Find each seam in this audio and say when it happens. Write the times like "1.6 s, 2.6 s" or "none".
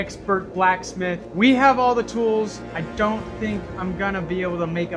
2.7 s